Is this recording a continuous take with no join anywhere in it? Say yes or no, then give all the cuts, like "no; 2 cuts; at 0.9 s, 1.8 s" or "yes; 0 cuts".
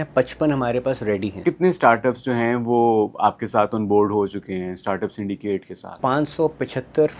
no; 2 cuts; at 1.4 s, 5.8 s